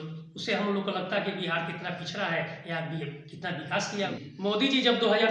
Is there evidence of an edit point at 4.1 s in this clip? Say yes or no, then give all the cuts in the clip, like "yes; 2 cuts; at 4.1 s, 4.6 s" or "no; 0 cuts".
yes; 1 cut; at 4.1 s